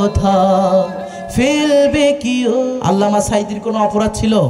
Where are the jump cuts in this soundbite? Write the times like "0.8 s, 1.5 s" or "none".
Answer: 2.7 s